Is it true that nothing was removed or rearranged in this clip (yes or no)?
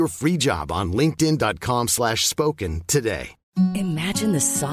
no